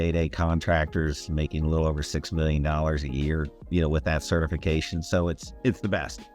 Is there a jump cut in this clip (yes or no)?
yes